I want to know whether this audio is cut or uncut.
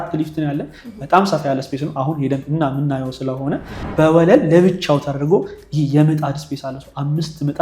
cut